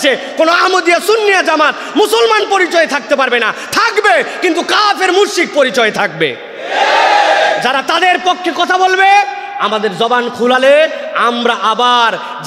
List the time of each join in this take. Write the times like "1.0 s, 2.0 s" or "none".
none